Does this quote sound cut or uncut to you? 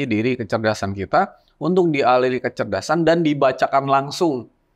uncut